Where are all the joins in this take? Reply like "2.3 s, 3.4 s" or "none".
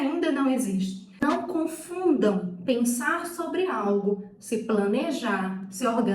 1.0 s

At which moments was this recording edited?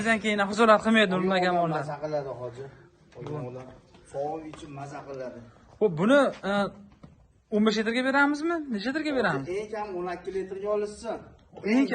none

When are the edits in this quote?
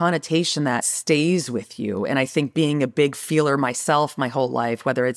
0.9 s

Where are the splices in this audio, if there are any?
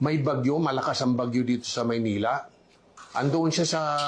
2.5 s

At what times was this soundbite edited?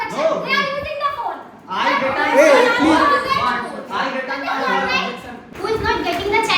5.4 s

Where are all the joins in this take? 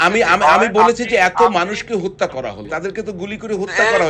2.7 s

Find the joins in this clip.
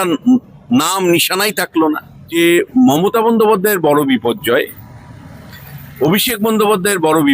2.2 s

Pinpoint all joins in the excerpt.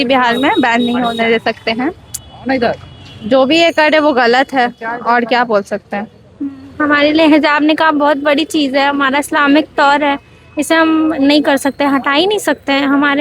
none

